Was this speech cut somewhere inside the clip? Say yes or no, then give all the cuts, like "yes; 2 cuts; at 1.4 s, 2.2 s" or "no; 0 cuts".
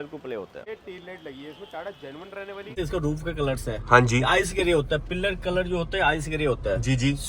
yes; 2 cuts; at 0.7 s, 2.7 s